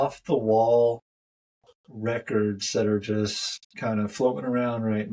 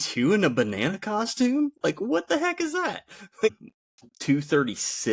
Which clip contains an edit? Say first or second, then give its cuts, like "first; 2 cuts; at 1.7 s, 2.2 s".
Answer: second; 1 cut; at 3.7 s